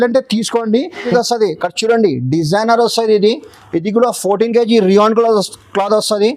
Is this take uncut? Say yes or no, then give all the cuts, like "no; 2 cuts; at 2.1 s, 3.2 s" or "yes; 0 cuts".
no; 1 cut; at 1.1 s